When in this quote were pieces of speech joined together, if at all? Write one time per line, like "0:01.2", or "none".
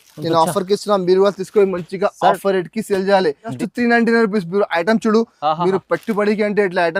0:03.6

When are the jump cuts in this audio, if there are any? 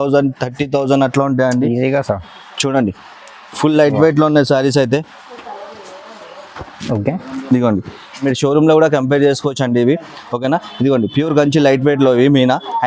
0:08.2

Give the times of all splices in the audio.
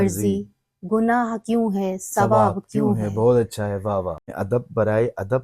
0:04.3

